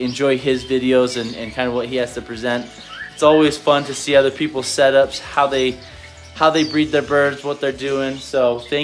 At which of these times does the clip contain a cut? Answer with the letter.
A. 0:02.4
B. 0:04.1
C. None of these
C